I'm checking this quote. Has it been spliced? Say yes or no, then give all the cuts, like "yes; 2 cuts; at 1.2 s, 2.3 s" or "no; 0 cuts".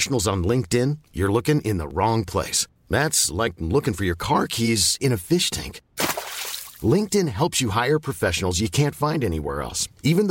no; 0 cuts